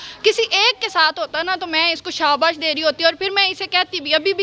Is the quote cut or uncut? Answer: uncut